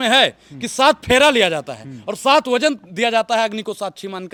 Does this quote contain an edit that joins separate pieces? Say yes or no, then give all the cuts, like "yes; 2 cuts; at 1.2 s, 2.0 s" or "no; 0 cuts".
no; 0 cuts